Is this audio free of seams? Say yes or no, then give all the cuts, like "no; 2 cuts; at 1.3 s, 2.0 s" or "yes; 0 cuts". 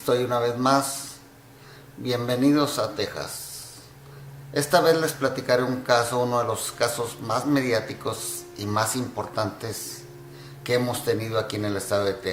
yes; 0 cuts